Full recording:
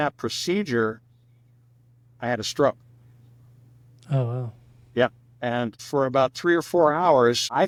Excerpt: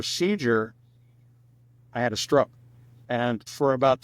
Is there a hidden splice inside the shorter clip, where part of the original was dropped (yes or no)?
yes